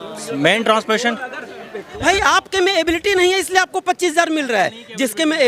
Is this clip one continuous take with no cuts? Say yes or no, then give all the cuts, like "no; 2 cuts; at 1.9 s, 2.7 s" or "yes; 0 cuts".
no; 1 cut; at 1.9 s